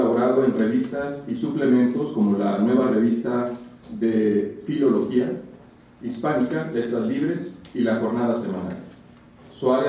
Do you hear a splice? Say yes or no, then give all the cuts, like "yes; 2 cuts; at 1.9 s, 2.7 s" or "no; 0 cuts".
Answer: no; 0 cuts